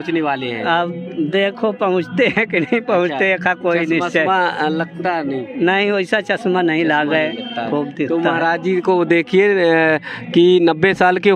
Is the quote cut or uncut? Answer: uncut